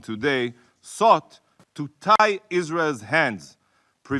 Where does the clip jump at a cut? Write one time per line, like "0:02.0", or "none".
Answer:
none